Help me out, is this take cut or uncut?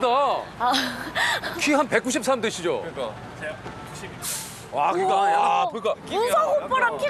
uncut